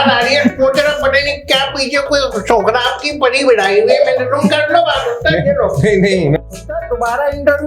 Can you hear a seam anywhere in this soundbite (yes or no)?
yes